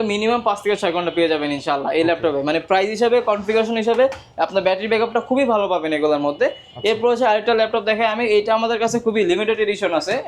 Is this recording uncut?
yes; 0 cuts

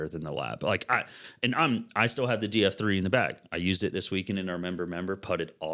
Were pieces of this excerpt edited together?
no; 0 cuts

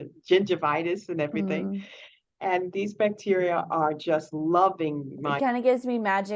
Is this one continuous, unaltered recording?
no; 1 cut; at 5.4 s

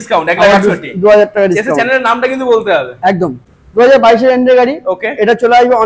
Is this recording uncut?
no; 1 cut; at 3.4 s

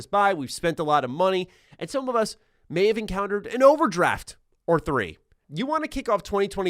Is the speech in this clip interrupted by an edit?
yes; 1 cut; at 5.4 s

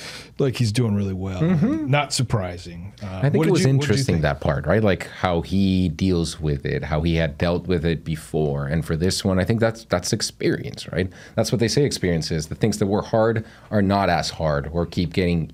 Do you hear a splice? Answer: no; 0 cuts

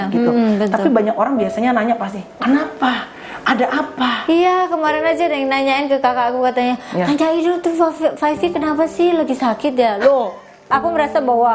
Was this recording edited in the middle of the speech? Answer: yes; 1 cut; at 10.6 s

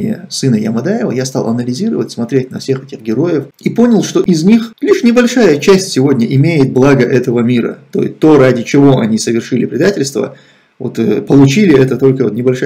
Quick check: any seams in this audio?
yes; 1 cut; at 3.5 s

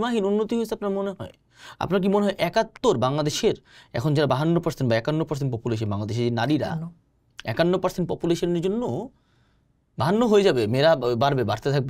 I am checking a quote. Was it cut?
no; 0 cuts

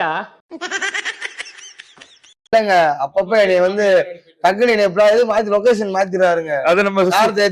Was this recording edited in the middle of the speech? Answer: no; 0 cuts

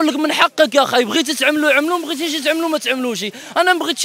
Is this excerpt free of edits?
yes; 0 cuts

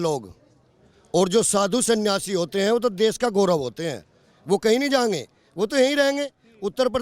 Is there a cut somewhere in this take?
no; 0 cuts

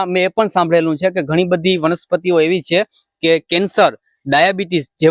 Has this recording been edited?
no; 0 cuts

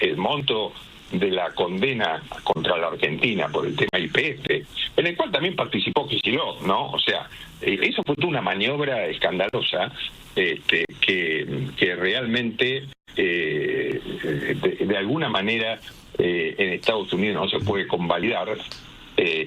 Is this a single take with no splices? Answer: yes; 0 cuts

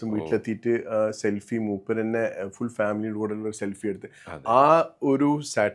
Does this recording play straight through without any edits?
yes; 0 cuts

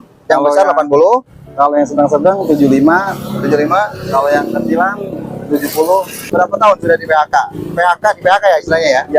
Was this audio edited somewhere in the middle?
yes; 1 cut; at 6.3 s

